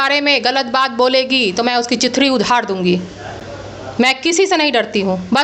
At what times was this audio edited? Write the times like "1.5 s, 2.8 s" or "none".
none